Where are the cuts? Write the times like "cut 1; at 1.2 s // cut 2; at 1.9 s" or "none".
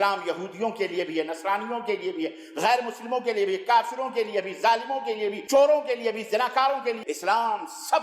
cut 1; at 5.4 s // cut 2; at 7.0 s